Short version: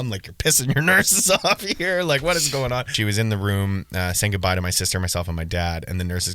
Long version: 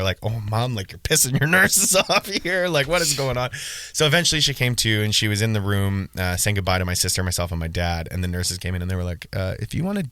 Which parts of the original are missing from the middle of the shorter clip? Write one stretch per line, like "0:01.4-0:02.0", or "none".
0:03.6-0:05.2